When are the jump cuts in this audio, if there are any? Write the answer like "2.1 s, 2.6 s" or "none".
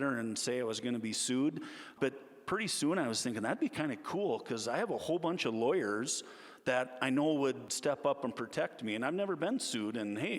1.9 s, 7.7 s